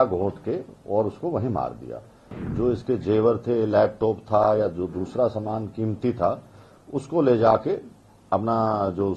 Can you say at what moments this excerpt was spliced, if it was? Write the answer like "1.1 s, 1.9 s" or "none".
2.4 s